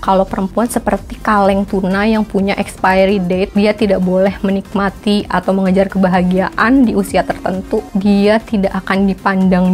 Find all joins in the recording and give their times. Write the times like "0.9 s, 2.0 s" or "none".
3.5 s, 7.9 s